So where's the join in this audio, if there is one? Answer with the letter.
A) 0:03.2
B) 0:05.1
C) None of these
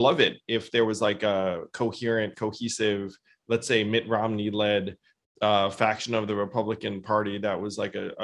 C